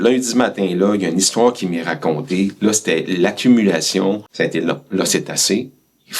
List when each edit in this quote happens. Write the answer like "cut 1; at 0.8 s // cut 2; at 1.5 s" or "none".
cut 1; at 4.3 s

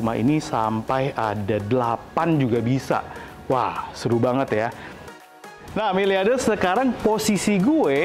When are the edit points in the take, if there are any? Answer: cut 1; at 5.2 s

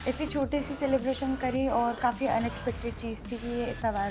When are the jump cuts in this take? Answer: none

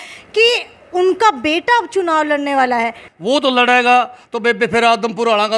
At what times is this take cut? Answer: cut 1; at 3.0 s

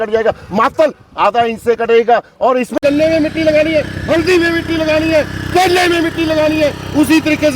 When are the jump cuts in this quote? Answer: cut 1; at 2.8 s

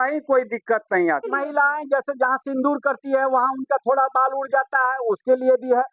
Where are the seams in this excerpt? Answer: cut 1; at 1.3 s

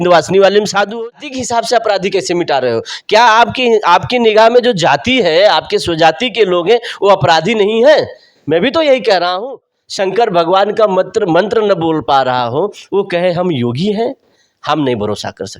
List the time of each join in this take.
cut 1; at 1.1 s // cut 2; at 9.5 s

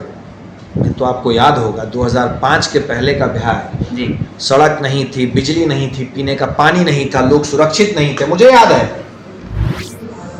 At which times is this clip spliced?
none

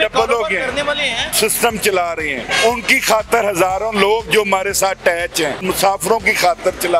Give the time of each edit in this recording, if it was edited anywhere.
cut 1; at 1.3 s // cut 2; at 2.5 s // cut 3; at 5.6 s

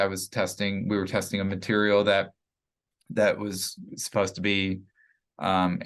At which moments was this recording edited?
none

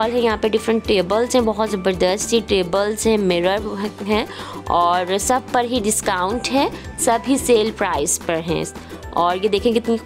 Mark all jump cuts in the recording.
none

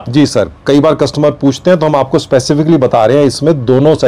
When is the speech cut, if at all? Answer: none

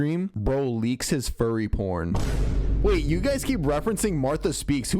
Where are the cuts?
cut 1; at 2.7 s

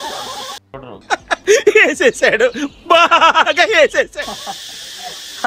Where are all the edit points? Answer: none

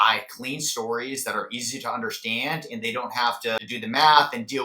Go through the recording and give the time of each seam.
cut 1; at 3.7 s

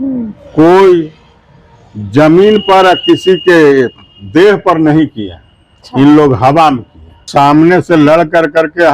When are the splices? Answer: cut 1; at 7.3 s

